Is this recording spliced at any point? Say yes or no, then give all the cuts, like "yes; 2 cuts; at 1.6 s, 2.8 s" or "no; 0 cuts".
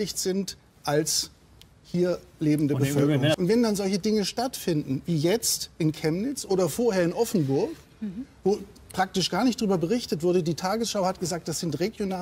yes; 1 cut; at 3.3 s